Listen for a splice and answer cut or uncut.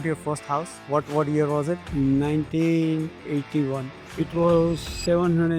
cut